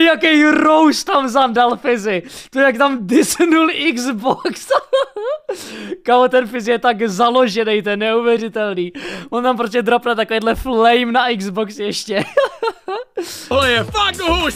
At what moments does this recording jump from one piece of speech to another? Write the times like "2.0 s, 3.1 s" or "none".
13.5 s